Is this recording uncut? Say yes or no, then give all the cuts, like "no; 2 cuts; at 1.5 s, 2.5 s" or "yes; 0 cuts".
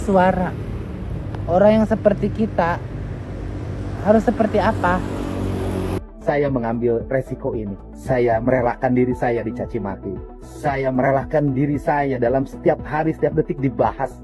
no; 1 cut; at 6.0 s